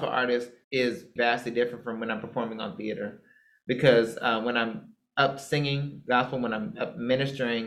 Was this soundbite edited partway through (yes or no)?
yes